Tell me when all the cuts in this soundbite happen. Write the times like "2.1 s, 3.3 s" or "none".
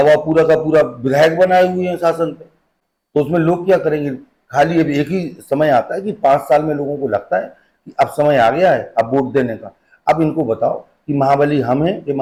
none